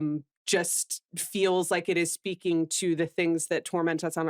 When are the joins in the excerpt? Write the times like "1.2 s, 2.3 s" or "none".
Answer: none